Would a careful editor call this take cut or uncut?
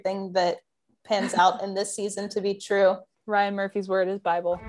cut